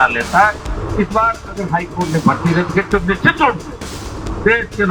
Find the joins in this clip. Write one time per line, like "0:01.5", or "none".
none